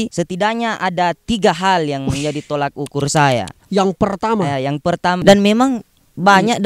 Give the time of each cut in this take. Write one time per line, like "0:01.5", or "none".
0:03.6
0:05.2